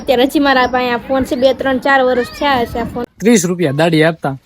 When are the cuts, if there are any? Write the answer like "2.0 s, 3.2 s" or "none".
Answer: 3.1 s